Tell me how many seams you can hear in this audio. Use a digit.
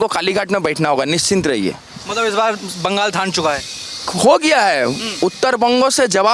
0